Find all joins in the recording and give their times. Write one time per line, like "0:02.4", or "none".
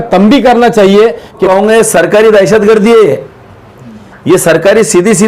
0:01.4